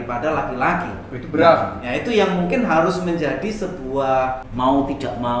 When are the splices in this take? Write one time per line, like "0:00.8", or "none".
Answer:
0:04.4